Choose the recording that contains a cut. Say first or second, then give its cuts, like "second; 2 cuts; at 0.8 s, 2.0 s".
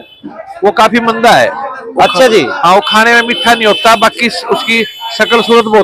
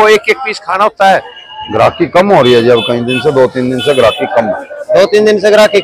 second; 1 cut; at 1.3 s